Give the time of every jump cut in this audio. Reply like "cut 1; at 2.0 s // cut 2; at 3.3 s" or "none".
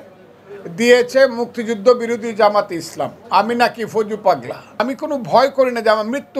cut 1; at 4.8 s